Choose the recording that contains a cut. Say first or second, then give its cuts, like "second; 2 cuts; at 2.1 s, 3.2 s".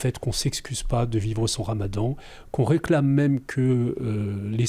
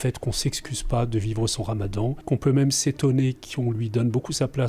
second; 1 cut; at 2.2 s